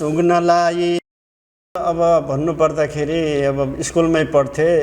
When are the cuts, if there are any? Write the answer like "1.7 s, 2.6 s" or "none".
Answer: 1.8 s